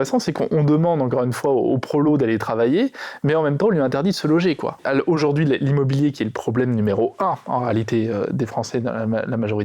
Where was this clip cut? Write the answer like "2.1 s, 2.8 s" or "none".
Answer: 4.8 s